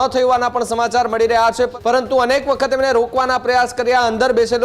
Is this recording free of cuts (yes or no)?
no